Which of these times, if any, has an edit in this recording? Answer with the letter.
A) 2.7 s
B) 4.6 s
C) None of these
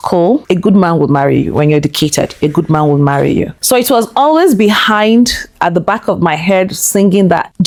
C